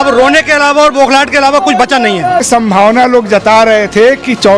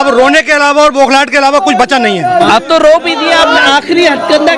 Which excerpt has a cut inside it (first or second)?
first